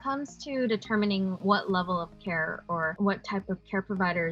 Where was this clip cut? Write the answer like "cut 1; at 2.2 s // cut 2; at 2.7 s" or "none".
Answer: cut 1; at 1.4 s // cut 2; at 2.9 s